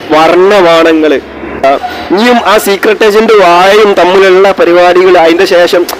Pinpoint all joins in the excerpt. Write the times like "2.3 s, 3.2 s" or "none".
1.6 s